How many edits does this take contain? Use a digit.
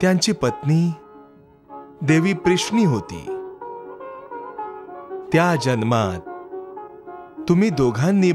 1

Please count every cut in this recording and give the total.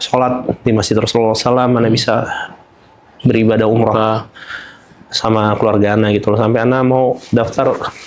0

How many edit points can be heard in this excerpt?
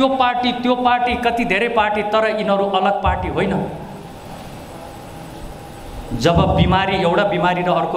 0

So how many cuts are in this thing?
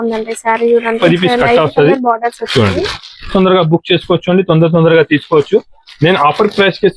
2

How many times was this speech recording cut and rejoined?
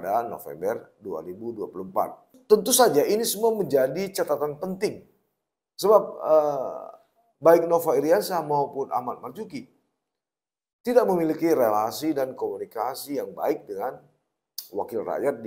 1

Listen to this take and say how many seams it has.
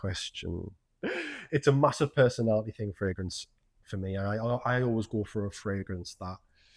1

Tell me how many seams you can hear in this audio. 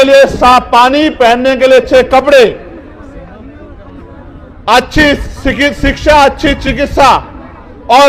0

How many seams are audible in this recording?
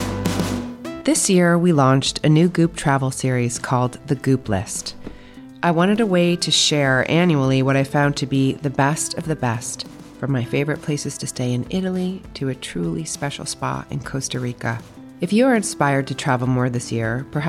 1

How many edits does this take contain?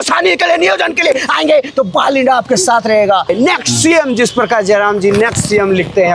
1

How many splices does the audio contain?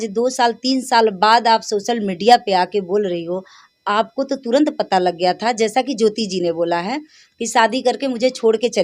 0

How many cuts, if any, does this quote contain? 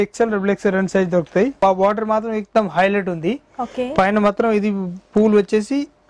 1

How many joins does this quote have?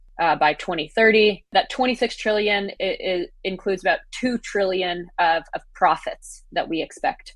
1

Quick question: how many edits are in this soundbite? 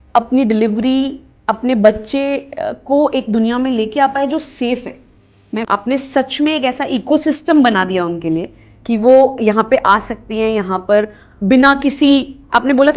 1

